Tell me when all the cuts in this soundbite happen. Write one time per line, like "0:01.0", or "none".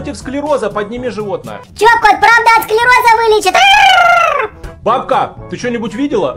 none